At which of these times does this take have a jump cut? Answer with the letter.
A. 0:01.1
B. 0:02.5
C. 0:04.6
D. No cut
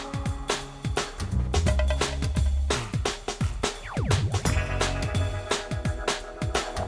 B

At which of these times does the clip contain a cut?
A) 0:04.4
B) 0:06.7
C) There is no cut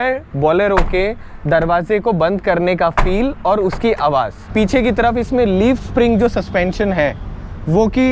A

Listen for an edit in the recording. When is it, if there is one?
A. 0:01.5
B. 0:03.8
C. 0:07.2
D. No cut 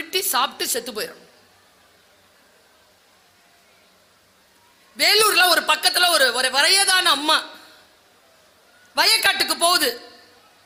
D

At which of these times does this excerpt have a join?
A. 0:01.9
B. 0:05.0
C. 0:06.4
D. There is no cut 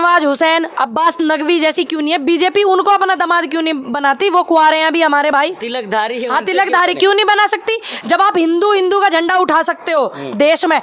D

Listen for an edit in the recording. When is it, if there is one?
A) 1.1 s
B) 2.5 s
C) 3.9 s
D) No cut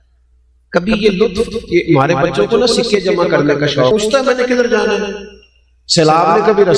C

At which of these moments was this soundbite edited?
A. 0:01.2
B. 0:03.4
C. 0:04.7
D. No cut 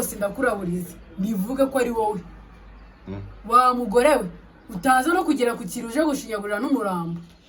D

